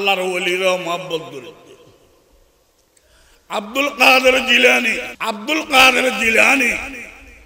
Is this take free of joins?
no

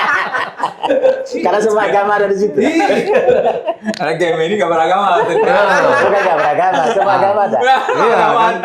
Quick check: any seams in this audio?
no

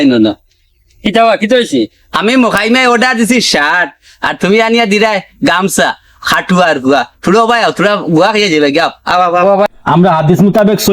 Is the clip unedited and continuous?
no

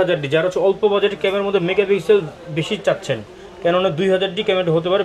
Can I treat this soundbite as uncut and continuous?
yes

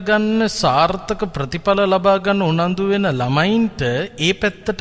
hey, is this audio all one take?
yes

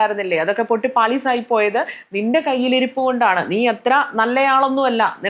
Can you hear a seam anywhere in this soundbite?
no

